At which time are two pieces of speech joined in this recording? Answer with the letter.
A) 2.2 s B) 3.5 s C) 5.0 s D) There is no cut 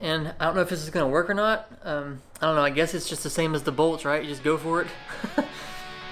A